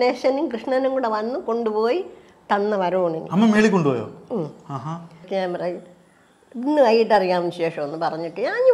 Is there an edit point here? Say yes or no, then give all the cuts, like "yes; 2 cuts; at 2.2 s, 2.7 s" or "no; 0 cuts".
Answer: yes; 1 cut; at 5.2 s